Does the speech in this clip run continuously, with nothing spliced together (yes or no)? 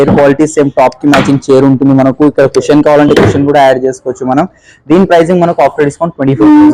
yes